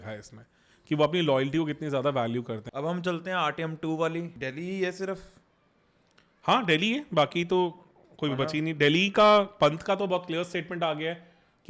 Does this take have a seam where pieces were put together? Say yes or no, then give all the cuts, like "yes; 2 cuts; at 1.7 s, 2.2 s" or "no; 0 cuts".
yes; 2 cuts; at 2.6 s, 4.3 s